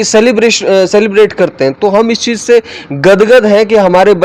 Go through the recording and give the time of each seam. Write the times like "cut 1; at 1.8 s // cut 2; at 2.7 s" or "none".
none